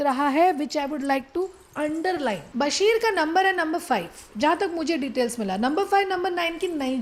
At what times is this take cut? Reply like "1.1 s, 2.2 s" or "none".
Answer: 2.4 s